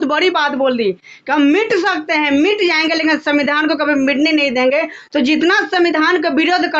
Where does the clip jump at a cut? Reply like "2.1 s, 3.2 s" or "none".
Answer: none